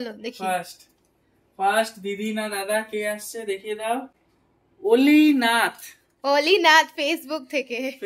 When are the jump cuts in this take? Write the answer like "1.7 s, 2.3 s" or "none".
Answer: none